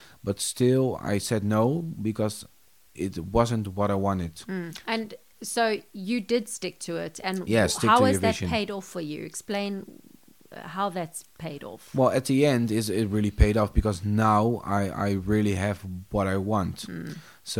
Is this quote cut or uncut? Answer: cut